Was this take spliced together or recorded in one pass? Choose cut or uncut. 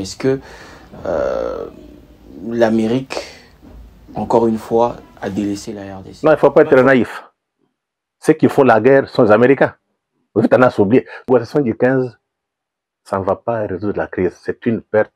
cut